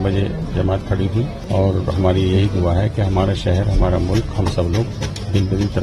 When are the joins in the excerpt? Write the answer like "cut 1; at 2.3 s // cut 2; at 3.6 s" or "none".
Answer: cut 1; at 1.4 s

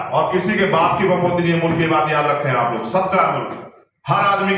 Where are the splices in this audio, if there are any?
none

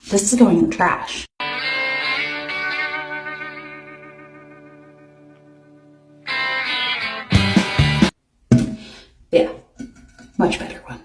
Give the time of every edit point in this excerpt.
none

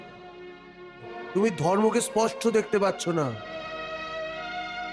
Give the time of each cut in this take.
cut 1; at 1.2 s

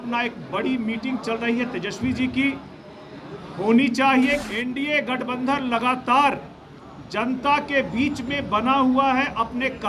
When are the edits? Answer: cut 1; at 4.4 s

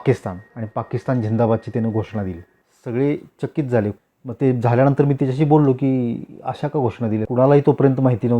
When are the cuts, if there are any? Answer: cut 1; at 4.0 s // cut 2; at 7.3 s

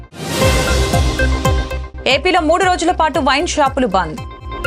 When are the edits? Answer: cut 1; at 1.8 s

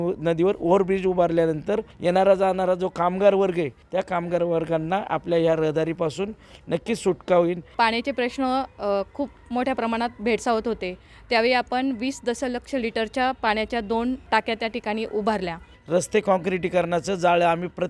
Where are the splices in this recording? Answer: cut 1; at 1.9 s // cut 2; at 3.8 s // cut 3; at 7.7 s // cut 4; at 14.2 s // cut 5; at 15.8 s

